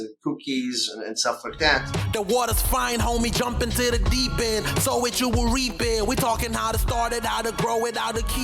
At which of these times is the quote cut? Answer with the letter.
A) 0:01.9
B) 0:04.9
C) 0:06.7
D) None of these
A